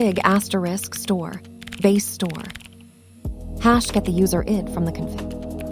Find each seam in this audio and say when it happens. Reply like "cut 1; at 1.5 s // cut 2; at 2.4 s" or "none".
cut 1; at 3.0 s